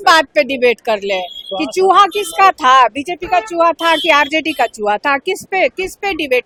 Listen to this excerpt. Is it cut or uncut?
uncut